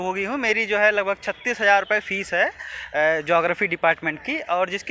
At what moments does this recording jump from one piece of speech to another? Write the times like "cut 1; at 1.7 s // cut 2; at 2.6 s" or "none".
none